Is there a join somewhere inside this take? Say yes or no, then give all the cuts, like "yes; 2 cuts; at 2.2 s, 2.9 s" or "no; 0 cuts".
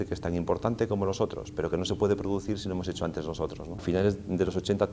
yes; 1 cut; at 3.8 s